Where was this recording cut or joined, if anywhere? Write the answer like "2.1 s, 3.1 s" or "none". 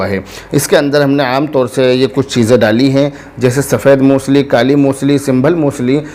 none